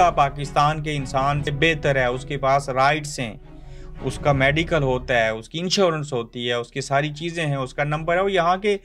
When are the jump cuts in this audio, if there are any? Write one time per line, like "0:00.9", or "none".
0:01.5

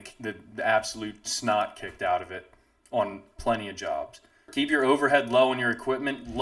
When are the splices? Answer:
0:04.5

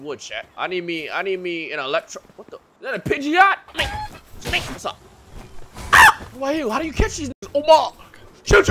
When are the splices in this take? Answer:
0:03.7
0:04.8
0:06.3

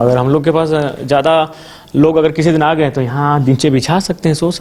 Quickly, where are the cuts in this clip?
none

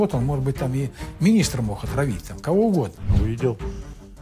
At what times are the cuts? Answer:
0:03.1

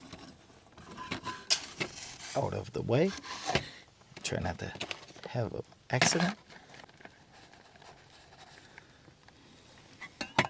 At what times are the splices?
0:06.8

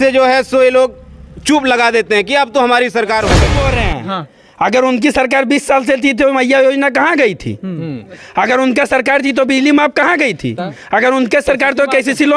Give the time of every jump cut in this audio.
0:03.7

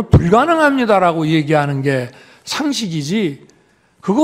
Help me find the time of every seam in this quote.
none

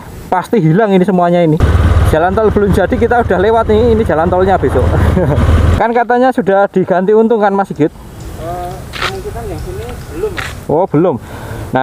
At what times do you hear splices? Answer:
0:01.6
0:05.7

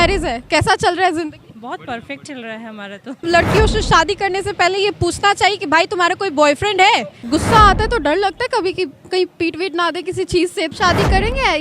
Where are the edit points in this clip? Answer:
0:03.2
0:07.2
0:10.7

